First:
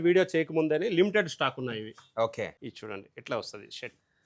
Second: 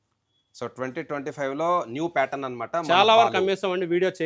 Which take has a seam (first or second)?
first